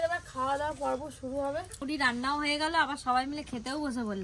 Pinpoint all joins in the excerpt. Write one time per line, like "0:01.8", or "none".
0:01.8